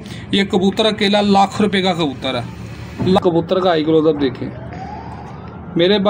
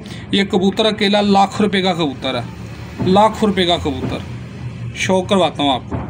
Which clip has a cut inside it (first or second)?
first